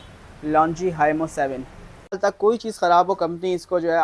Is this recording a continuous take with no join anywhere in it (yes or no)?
no